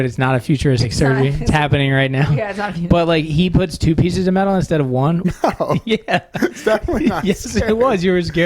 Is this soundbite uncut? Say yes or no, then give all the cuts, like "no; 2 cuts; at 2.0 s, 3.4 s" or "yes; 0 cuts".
no; 1 cut; at 5.2 s